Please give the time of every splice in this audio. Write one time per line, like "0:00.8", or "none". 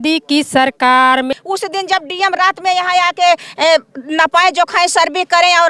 0:01.4